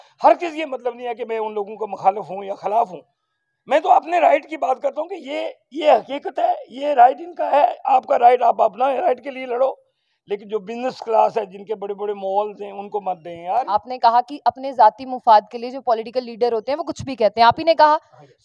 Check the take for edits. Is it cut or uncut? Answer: cut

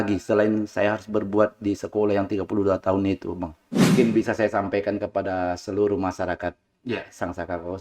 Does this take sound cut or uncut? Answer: cut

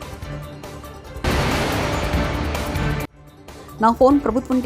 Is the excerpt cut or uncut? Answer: cut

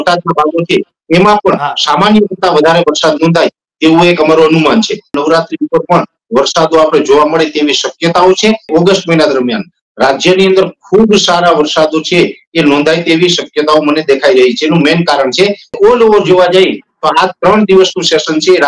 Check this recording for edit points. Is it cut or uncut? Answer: cut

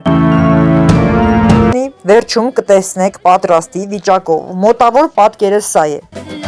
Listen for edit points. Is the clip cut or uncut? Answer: cut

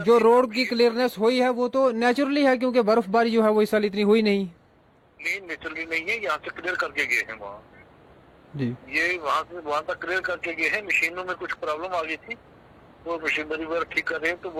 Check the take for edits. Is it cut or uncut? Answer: uncut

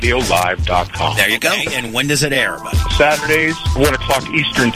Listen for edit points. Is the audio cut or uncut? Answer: cut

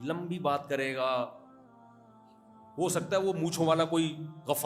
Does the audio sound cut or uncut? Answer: cut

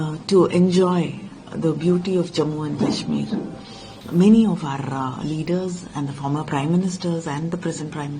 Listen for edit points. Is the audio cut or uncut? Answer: cut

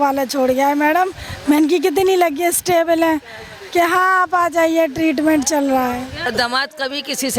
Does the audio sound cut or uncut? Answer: cut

